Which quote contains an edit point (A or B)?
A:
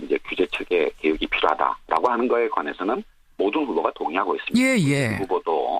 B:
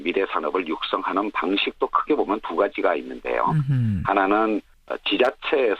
B